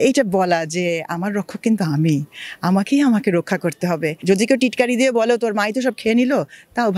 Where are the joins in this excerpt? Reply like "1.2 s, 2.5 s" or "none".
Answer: 4.2 s